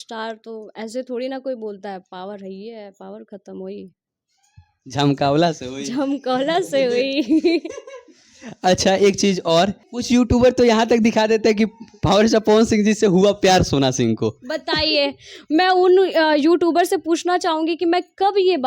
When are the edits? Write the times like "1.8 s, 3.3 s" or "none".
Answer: 9.9 s